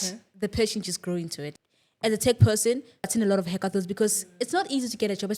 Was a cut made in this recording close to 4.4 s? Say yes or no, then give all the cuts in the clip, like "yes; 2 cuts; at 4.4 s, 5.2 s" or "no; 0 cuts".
no; 2 cuts; at 1.4 s, 3.1 s